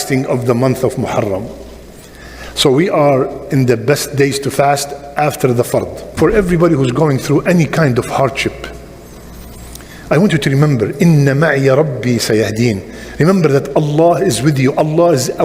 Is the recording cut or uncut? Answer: cut